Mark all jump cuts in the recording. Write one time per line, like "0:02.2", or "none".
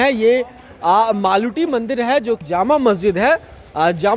0:02.4